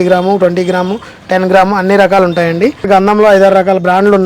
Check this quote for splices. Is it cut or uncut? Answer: cut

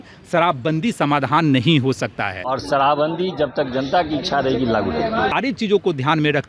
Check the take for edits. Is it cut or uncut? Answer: cut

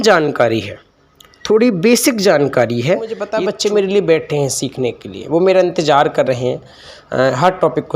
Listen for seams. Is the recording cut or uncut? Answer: cut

